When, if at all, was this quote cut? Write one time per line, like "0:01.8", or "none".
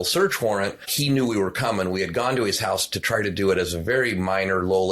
0:00.9